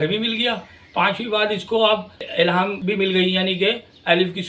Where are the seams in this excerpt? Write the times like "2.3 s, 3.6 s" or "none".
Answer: 2.6 s